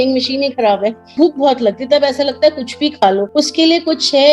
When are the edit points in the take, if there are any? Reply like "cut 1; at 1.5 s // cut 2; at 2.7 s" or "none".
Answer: cut 1; at 1.1 s // cut 2; at 3.3 s